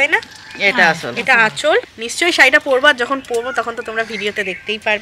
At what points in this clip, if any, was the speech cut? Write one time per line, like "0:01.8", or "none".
0:02.0